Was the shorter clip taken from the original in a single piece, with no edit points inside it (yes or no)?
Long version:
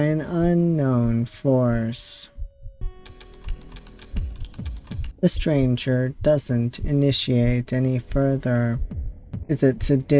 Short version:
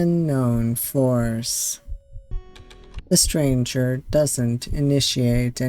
no